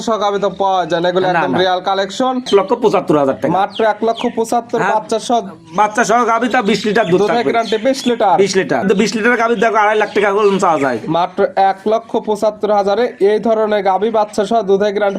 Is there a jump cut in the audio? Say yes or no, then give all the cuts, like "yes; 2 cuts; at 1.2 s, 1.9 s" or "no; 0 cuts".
yes; 2 cuts; at 2.5 s, 8.8 s